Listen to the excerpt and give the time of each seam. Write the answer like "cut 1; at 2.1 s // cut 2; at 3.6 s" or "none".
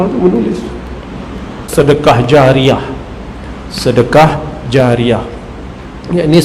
cut 1; at 1.6 s